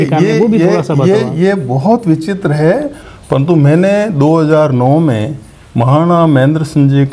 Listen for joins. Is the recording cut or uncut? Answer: uncut